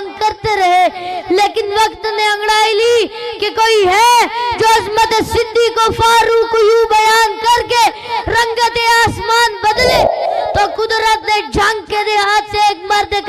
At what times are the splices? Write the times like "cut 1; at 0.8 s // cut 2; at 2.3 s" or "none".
cut 1; at 10.3 s